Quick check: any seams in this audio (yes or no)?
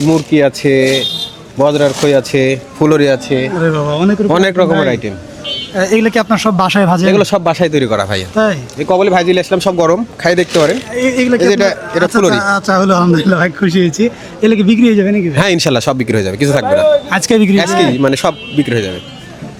no